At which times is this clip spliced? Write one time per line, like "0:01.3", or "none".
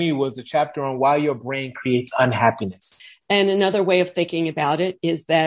0:03.0